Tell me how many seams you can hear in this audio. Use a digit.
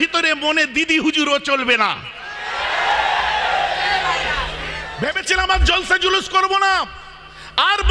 1